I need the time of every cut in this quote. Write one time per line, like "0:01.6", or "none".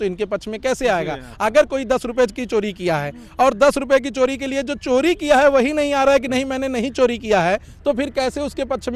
none